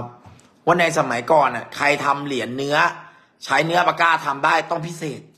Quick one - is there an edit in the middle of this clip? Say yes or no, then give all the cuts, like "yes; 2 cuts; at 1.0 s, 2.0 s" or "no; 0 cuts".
no; 0 cuts